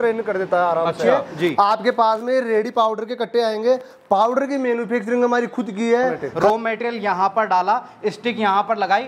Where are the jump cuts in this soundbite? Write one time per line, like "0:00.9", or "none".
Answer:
0:01.1
0:06.3